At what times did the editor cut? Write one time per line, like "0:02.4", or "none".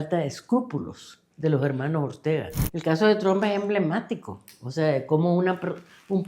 0:02.6